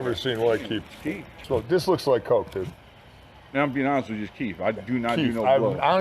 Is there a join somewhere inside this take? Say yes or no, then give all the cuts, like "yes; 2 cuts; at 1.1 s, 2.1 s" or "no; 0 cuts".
yes; 1 cut; at 1.4 s